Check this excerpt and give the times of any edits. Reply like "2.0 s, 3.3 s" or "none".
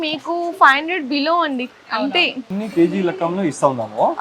2.5 s